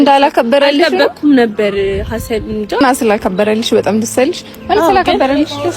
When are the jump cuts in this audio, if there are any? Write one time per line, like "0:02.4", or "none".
0:02.7